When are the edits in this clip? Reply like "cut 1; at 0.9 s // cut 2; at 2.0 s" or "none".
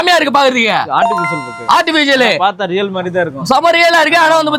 none